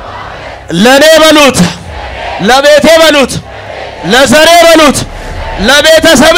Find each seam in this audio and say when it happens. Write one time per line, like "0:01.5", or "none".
none